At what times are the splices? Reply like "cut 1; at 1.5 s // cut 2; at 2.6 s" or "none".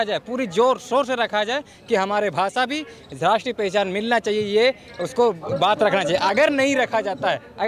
none